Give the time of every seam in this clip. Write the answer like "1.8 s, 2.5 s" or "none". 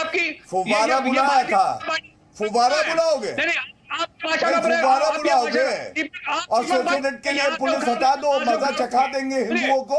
7.0 s